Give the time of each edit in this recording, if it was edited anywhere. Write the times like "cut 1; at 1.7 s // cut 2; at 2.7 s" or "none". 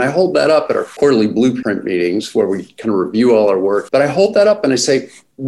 cut 1; at 0.9 s // cut 2; at 1.6 s // cut 3; at 3.8 s